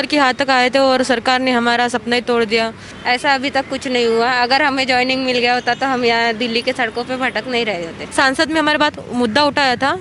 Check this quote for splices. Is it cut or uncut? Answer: cut